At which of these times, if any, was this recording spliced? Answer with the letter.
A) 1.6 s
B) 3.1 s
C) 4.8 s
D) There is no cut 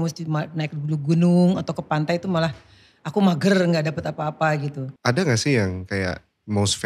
C